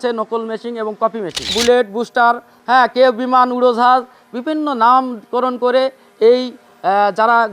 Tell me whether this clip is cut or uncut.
cut